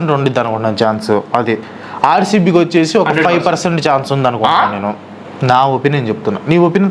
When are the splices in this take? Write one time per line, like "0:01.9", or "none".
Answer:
none